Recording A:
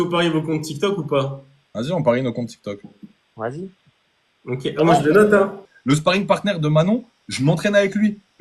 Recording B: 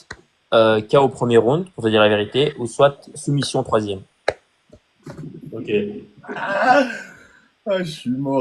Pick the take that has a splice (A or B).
A